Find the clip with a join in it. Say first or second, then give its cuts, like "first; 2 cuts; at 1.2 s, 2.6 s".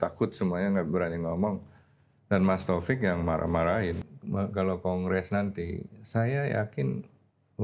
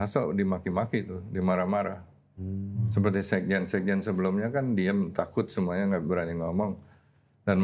first; 1 cut; at 4.1 s